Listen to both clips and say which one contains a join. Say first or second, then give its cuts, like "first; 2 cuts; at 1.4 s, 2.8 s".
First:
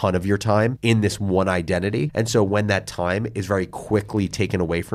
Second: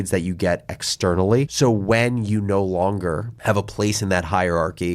second; 1 cut; at 1.5 s